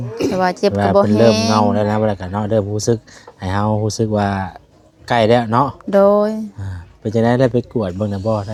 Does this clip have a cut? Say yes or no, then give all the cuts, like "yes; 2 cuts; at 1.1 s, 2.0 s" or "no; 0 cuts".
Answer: no; 0 cuts